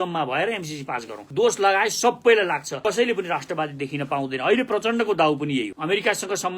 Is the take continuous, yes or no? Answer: no